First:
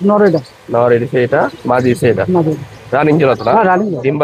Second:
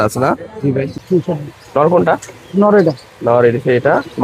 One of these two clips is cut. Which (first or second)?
second